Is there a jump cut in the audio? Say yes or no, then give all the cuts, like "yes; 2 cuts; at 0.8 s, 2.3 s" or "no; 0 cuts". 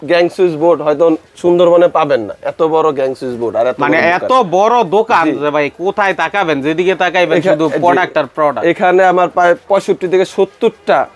no; 0 cuts